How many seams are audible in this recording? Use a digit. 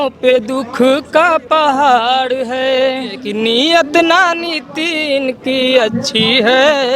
1